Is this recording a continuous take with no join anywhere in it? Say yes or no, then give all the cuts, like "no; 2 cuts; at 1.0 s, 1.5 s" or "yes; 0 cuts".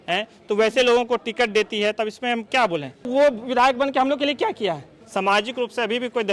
no; 2 cuts; at 3.1 s, 4.9 s